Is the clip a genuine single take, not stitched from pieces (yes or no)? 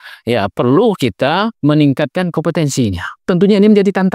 no